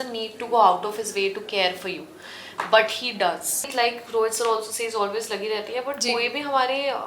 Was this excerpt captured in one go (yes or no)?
no